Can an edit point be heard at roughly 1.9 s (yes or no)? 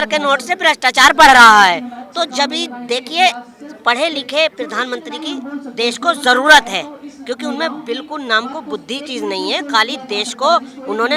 no